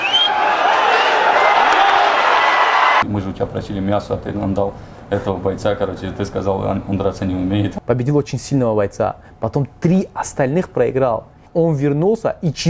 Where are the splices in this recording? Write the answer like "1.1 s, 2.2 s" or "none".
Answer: 3.0 s, 7.7 s, 11.4 s